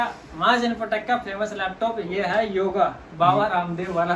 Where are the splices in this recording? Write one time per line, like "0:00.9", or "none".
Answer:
none